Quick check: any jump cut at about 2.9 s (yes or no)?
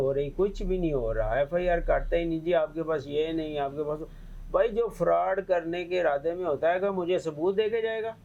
no